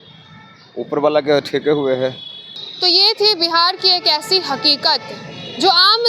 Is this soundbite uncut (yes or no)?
yes